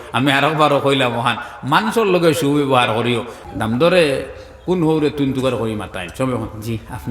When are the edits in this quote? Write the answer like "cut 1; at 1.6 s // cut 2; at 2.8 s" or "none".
cut 1; at 3.4 s